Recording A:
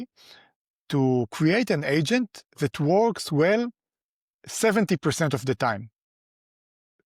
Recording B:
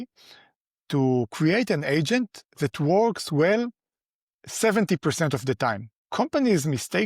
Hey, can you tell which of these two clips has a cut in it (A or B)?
B